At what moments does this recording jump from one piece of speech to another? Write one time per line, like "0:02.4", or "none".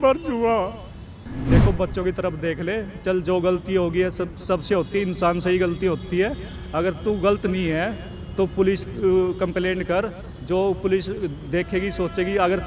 0:01.3